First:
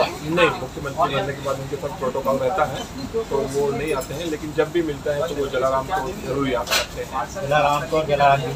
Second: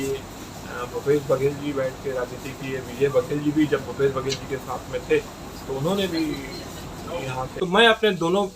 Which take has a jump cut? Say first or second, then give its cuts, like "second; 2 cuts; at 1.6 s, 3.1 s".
second; 1 cut; at 7.4 s